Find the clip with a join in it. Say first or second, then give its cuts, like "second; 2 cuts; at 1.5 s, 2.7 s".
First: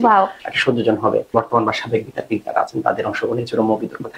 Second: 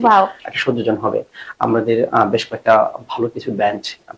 first; 1 cut; at 1.3 s